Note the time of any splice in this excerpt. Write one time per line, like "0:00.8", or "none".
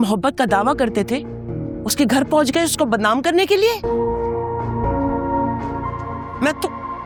none